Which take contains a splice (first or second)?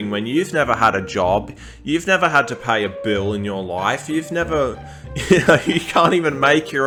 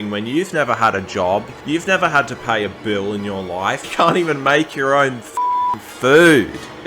second